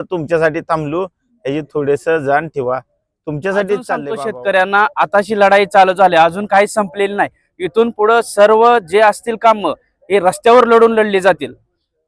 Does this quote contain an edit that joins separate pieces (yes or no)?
yes